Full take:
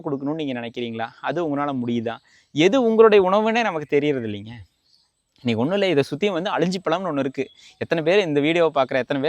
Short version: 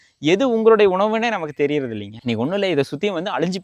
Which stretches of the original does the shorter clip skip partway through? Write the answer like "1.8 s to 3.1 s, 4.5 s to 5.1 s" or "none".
4.4 s to 5.3 s

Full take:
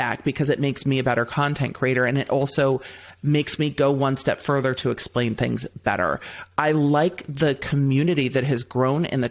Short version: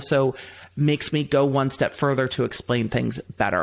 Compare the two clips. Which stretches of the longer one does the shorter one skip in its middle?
none

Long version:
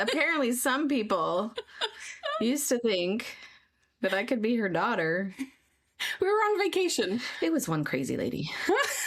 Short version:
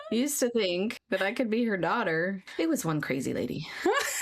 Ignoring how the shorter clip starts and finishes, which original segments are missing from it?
3.3 s to 3.9 s, 5.4 s to 7.3 s

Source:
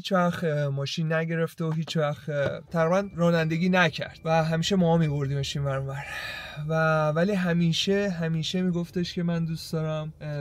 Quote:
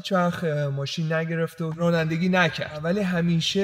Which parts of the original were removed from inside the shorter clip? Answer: 1.7 s to 3.1 s, 4.2 s to 7.1 s

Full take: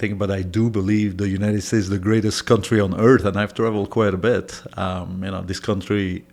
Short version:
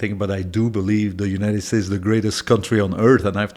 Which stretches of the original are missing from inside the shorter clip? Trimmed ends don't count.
none

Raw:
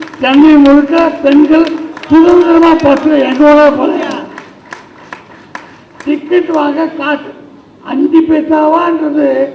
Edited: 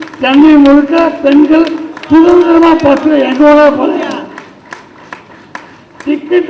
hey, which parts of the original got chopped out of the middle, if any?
none

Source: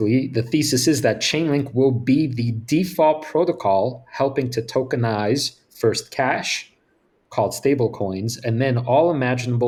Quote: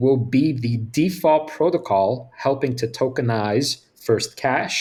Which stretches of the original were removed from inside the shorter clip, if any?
none

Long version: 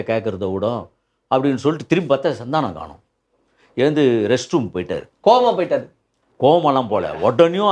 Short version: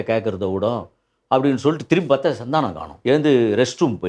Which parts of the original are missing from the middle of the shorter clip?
2.8 s to 3.6 s

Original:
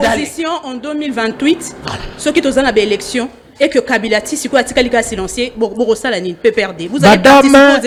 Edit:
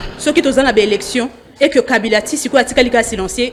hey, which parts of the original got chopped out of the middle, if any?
none

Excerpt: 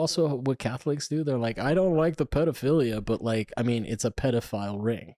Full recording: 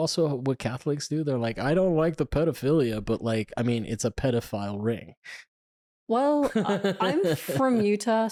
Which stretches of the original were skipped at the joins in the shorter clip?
none

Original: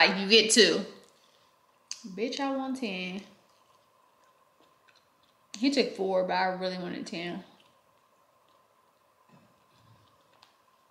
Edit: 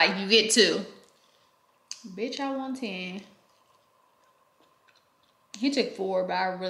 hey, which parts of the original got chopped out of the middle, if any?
none

